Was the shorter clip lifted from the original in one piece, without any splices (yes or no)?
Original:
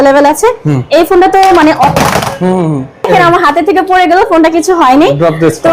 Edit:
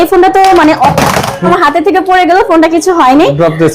no